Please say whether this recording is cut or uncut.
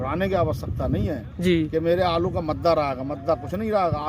uncut